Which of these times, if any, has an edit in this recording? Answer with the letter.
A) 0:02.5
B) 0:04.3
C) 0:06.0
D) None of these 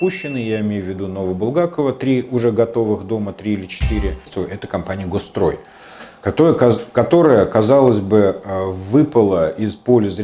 B